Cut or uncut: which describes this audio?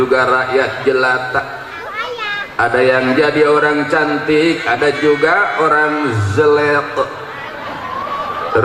uncut